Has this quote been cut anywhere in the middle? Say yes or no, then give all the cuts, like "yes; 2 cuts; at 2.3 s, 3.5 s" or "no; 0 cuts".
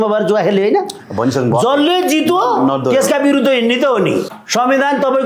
yes; 1 cut; at 4.3 s